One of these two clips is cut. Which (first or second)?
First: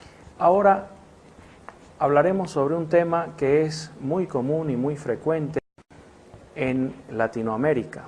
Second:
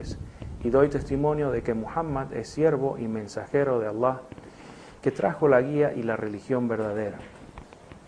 second